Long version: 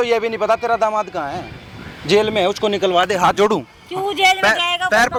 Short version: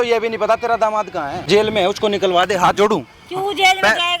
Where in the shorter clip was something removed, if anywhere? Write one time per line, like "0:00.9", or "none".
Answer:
0:01.3